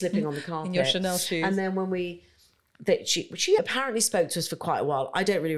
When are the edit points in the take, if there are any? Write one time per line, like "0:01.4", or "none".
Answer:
0:03.6